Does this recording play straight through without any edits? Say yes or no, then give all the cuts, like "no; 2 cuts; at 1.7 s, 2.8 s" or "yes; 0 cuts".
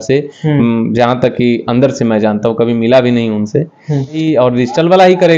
no; 1 cut; at 4.2 s